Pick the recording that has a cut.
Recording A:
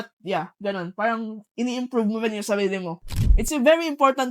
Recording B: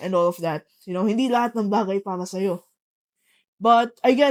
A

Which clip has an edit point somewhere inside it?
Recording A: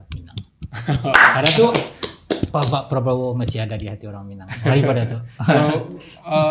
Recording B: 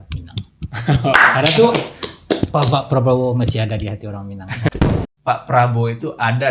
B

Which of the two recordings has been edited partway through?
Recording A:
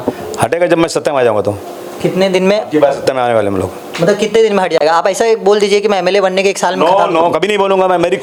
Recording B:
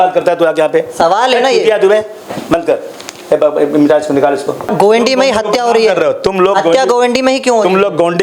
B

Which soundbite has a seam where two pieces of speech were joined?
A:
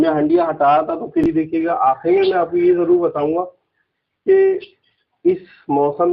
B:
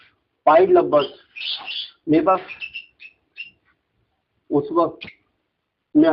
A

